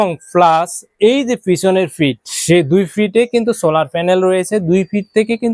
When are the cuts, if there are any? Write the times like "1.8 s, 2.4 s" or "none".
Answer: none